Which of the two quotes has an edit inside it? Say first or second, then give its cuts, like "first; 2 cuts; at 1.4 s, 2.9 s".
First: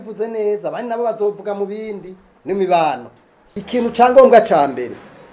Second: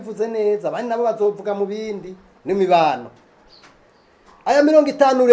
first; 1 cut; at 3.7 s